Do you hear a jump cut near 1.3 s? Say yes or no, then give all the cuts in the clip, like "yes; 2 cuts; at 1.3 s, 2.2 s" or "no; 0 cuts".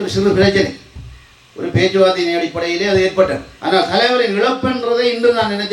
no; 1 cut; at 3.5 s